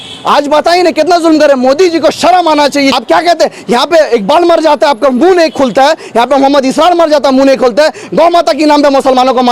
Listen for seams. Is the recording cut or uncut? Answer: cut